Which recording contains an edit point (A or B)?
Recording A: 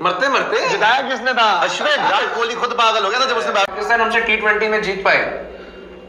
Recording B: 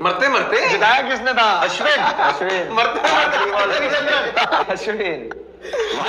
A